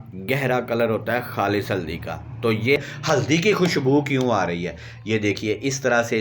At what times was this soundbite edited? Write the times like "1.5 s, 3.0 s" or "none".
2.8 s